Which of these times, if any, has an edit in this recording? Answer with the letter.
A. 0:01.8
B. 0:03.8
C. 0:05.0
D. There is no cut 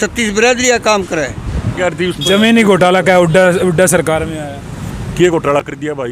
A